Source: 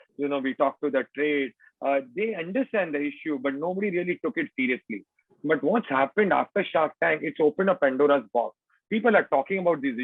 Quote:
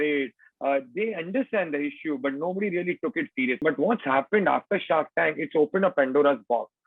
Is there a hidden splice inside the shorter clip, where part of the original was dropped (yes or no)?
yes